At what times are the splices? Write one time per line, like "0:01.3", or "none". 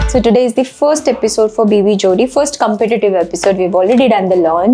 none